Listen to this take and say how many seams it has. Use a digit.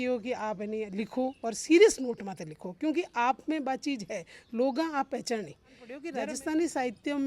1